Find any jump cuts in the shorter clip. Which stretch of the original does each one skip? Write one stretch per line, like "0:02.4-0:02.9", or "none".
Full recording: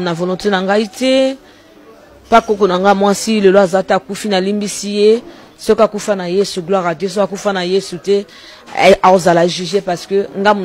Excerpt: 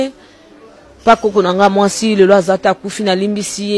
none